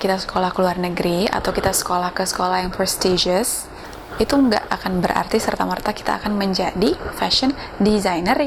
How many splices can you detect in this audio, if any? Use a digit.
0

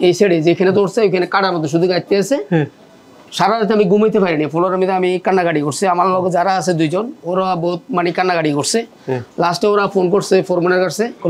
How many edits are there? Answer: 0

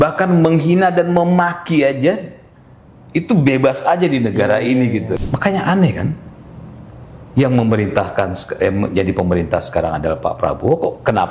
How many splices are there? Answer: 1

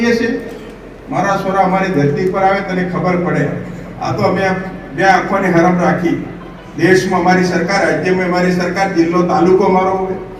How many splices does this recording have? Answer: 0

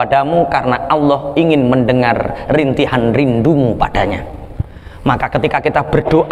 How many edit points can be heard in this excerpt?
0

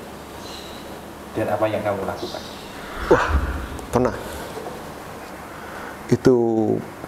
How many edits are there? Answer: 1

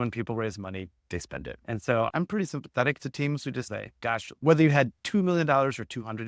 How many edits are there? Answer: 2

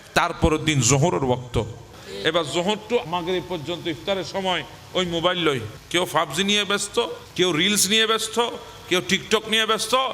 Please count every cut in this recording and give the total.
4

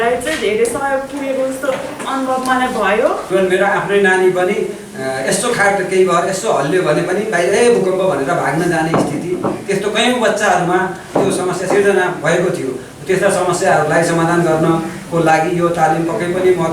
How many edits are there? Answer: 1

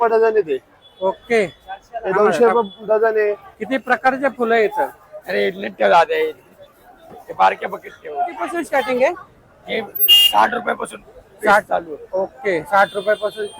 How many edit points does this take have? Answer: 2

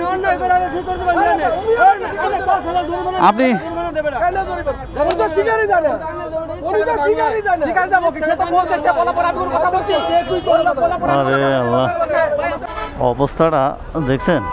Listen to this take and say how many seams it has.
1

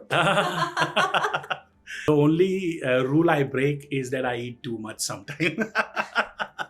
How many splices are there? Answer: 1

